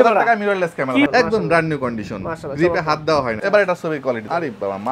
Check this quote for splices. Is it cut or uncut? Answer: cut